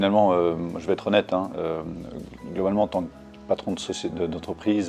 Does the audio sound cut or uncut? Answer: uncut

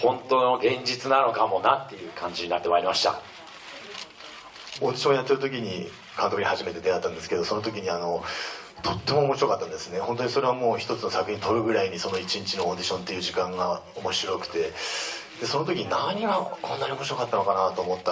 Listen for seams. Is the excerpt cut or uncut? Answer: uncut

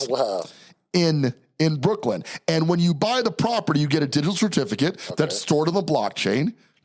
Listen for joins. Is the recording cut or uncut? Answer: uncut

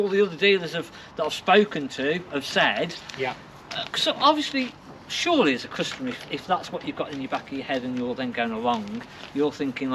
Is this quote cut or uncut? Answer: uncut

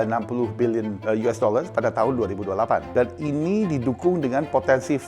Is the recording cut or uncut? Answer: cut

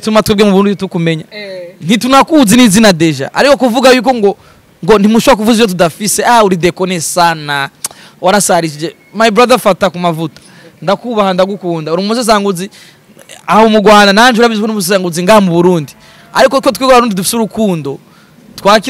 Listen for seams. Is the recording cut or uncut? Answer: uncut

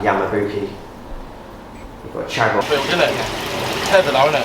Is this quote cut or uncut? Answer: cut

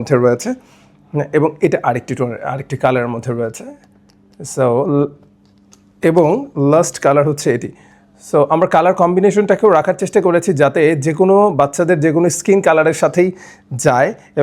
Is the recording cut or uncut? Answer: uncut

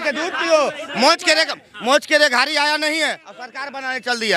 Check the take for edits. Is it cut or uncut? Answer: uncut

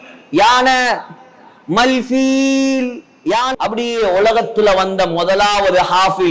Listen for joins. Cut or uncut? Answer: cut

